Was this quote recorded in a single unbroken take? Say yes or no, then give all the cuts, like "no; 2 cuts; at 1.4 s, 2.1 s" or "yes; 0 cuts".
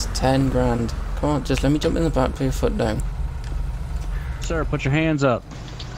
no; 1 cut; at 4.3 s